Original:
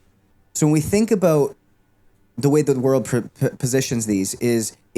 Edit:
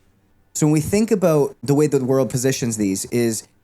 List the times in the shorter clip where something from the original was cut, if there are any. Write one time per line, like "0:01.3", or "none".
0:01.6
0:02.3